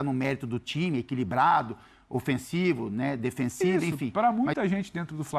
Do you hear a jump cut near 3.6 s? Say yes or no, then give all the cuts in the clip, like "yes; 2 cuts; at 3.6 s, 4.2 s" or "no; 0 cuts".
yes; 1 cut; at 3.6 s